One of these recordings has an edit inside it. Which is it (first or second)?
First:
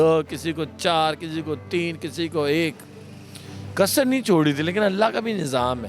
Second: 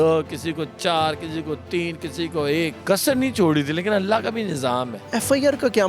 second